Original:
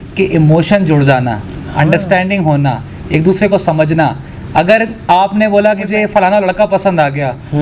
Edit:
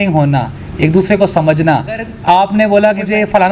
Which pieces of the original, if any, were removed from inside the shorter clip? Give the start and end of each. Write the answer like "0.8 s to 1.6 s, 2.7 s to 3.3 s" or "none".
4.4 s to 4.9 s

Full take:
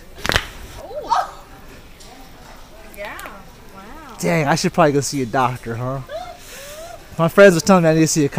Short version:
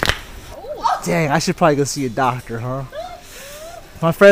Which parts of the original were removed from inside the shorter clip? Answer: 1.3 s to 4.2 s

